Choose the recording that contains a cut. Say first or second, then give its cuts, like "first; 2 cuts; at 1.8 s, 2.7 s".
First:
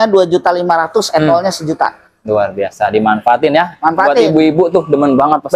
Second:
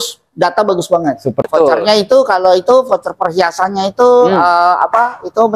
second; 1 cut; at 1.4 s